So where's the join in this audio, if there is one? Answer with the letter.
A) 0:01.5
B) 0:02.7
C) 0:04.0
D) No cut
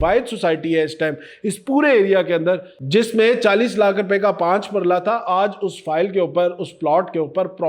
B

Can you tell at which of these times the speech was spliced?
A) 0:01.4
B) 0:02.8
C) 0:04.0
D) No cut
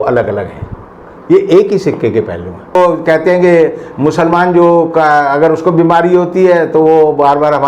B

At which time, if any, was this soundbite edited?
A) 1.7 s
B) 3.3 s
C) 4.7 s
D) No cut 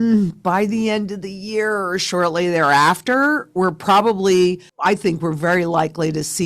C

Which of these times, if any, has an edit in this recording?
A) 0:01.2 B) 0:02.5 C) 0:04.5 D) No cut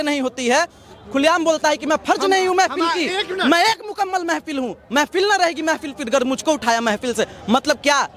D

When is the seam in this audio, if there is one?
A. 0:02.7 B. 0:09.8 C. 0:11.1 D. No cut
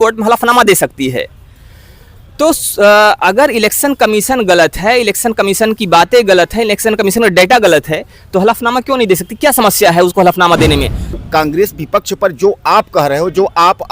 C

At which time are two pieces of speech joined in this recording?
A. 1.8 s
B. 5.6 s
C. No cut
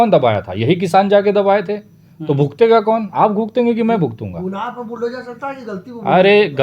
C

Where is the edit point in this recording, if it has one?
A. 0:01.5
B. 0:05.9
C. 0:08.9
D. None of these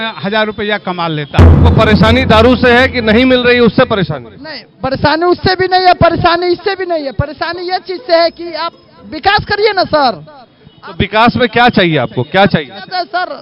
A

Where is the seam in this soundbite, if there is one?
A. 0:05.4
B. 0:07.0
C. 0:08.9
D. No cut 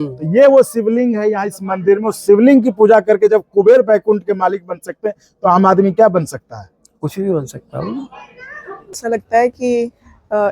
C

